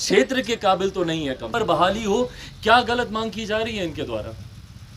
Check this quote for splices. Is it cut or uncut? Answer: cut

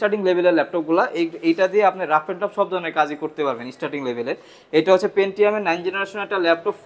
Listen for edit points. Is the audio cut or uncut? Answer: uncut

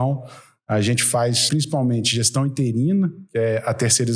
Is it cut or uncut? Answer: cut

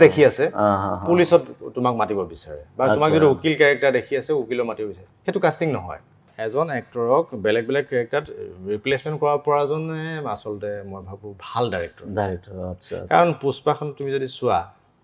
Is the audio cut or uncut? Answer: cut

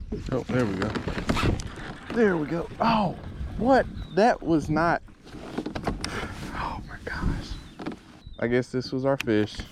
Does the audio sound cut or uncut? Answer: uncut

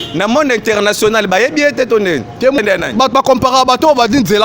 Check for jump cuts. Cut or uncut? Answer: cut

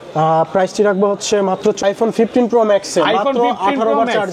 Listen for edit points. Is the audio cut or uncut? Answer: cut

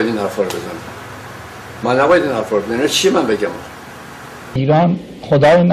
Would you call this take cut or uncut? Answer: cut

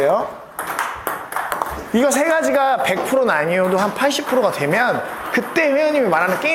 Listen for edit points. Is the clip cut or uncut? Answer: uncut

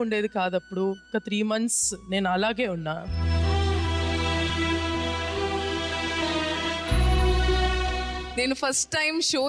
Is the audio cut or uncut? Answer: cut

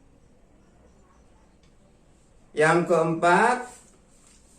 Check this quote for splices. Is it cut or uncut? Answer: cut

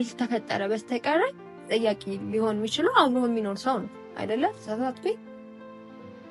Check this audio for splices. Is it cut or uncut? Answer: uncut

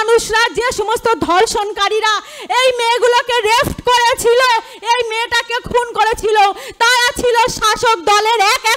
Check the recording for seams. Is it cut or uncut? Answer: uncut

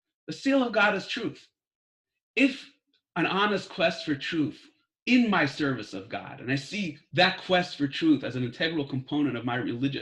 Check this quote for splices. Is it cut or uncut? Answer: cut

